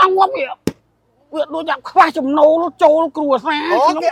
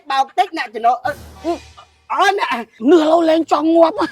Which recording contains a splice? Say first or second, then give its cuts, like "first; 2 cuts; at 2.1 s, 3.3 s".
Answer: second; 1 cut; at 2.7 s